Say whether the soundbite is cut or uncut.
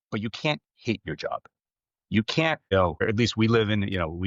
uncut